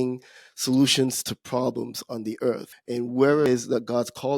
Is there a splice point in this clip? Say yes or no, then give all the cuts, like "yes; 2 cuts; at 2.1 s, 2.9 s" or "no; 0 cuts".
yes; 2 cuts; at 2.7 s, 3.5 s